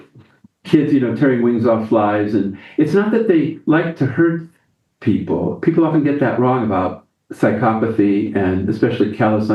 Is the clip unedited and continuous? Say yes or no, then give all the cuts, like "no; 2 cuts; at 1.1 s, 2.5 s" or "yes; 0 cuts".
yes; 0 cuts